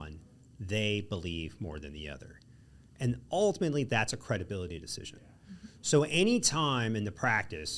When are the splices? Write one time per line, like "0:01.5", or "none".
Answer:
none